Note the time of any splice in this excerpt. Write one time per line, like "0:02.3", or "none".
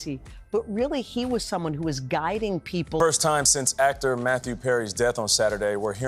0:03.0